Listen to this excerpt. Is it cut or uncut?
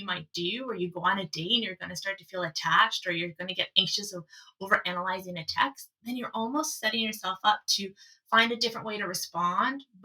uncut